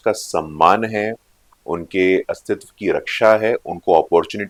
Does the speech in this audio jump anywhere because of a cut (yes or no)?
no